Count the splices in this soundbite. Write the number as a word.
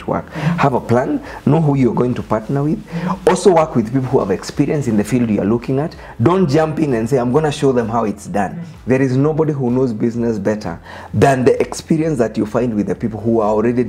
zero